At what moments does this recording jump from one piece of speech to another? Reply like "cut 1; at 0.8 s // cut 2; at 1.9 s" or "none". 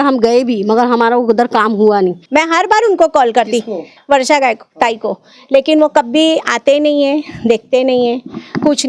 cut 1; at 2.2 s